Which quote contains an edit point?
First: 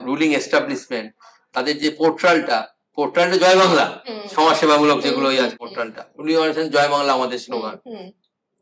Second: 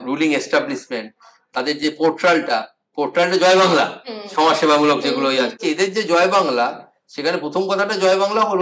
second; 1 cut; at 5.6 s

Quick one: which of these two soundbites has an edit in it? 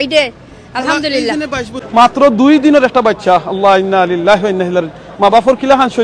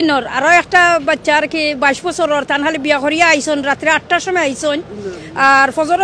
first; 1 cut; at 1.8 s

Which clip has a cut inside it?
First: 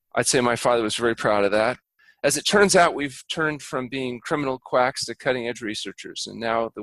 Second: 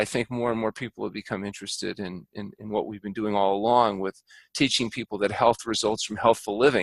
first; 1 cut; at 1.8 s

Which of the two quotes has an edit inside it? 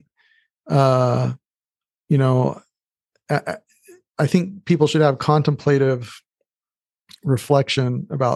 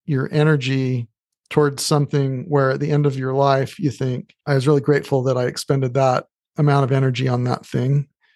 second; 1 cut; at 4.3 s

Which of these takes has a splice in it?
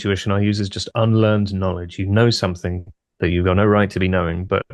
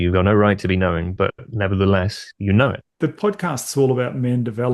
second; 1 cut; at 2.9 s

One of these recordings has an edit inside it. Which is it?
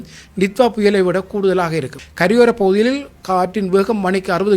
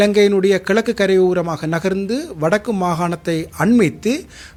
first; 1 cut; at 2.0 s

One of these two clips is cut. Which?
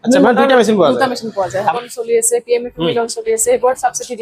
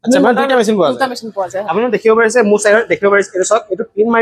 first; 1 cut; at 1.7 s

